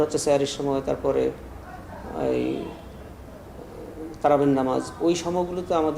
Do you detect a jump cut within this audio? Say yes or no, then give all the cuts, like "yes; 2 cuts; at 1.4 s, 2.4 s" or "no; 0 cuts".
no; 0 cuts